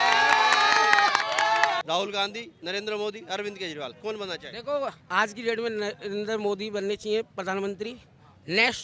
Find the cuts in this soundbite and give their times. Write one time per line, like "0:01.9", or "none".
0:01.8
0:05.0